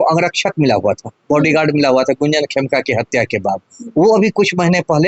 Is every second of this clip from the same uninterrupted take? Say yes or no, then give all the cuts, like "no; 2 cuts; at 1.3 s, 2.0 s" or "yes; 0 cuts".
yes; 0 cuts